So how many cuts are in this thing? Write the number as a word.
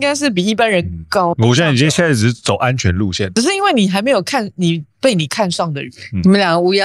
two